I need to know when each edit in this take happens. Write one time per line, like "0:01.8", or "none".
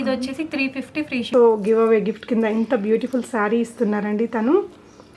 0:01.3